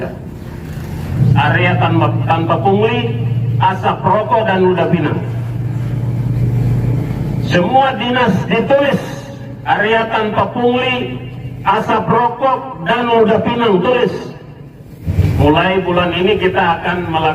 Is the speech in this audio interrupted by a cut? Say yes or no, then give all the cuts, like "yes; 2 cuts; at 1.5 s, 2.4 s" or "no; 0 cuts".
yes; 2 cuts; at 1.2 s, 15.1 s